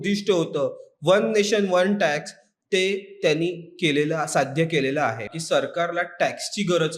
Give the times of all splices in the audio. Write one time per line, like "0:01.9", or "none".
0:05.3